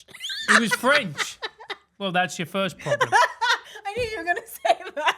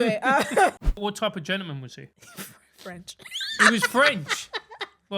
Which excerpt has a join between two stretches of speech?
second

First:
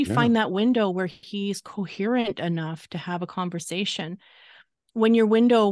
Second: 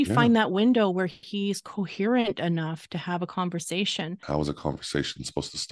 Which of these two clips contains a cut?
second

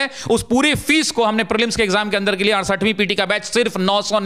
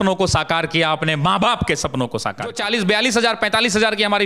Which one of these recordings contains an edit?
second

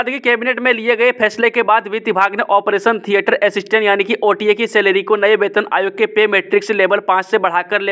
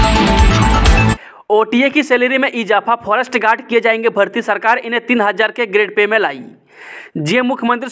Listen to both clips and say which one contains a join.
second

